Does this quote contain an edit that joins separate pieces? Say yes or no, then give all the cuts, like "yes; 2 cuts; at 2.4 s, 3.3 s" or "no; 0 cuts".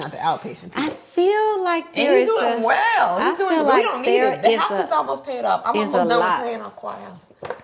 no; 0 cuts